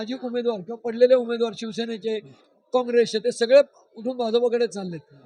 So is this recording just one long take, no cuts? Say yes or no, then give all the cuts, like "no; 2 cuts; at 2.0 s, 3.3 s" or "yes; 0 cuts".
yes; 0 cuts